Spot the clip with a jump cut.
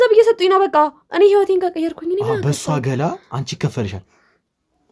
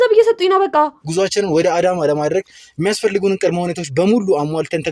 second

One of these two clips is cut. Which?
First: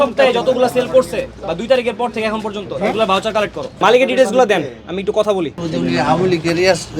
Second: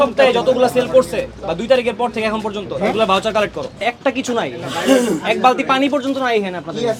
first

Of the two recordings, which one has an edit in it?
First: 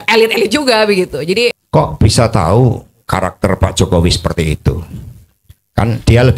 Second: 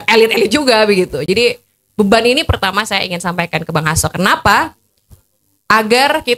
first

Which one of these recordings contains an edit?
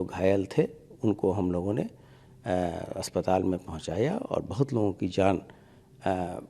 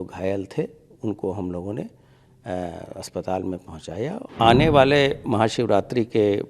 second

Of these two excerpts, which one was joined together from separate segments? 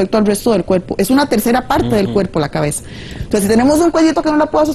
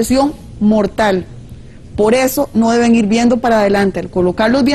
first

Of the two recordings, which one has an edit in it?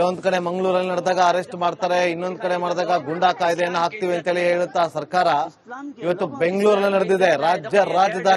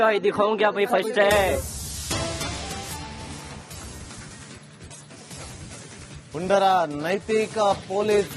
second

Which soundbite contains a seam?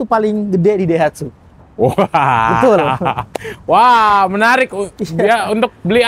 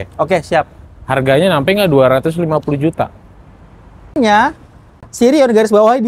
second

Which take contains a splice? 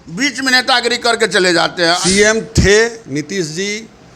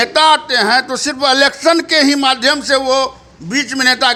first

